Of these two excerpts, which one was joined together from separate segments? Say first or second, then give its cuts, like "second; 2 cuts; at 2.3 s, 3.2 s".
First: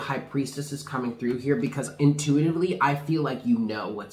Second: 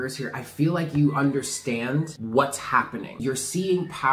second; 2 cuts; at 2.2 s, 3.2 s